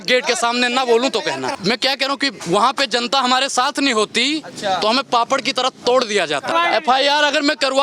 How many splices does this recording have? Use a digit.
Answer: 2